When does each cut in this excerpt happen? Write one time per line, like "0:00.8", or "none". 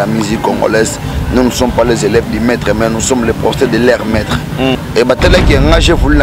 0:04.8